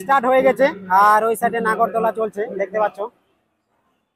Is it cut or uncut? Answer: uncut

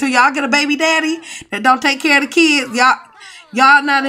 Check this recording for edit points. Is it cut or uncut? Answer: uncut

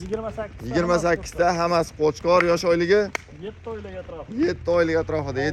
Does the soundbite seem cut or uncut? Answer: uncut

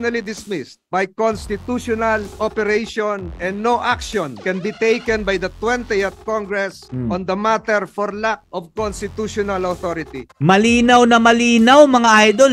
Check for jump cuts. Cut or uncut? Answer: uncut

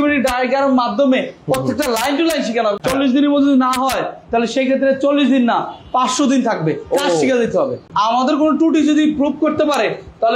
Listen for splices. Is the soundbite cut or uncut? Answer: cut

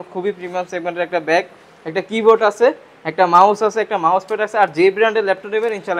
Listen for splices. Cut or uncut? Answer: uncut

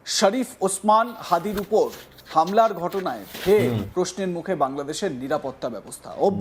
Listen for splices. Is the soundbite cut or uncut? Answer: uncut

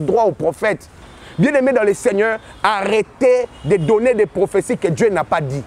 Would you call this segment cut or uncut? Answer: cut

